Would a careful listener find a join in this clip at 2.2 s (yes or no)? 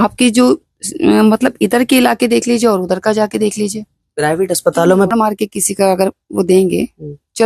no